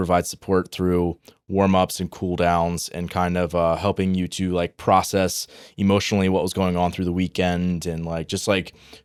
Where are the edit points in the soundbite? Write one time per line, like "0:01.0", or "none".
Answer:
none